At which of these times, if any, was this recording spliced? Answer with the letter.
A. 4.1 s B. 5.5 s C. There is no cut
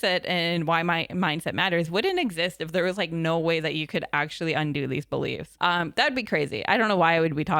B